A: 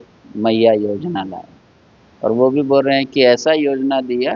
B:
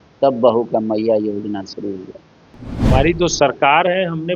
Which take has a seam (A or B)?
B